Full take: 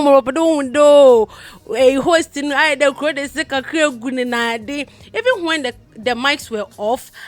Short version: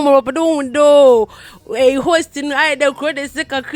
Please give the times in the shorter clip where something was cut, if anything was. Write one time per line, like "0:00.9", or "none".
none